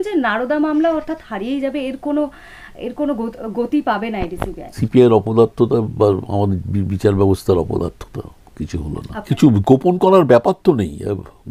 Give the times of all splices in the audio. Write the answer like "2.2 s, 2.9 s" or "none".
4.8 s, 9.3 s